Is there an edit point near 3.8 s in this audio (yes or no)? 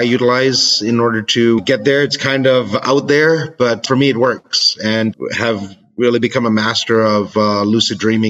yes